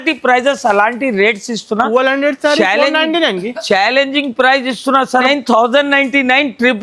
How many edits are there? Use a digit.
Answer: 1